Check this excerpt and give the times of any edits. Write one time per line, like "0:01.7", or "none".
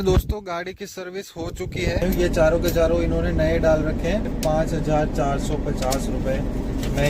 0:02.0
0:04.3